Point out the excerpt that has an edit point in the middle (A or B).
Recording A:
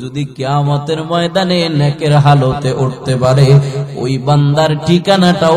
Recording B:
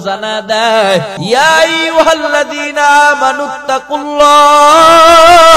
B